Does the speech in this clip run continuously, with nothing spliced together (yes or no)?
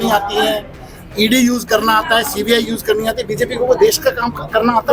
yes